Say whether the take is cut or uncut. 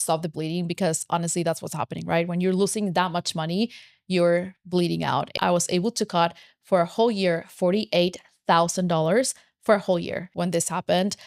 cut